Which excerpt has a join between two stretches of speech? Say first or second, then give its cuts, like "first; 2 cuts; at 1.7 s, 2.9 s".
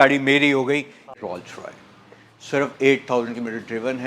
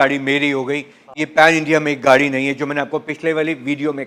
first; 1 cut; at 1.1 s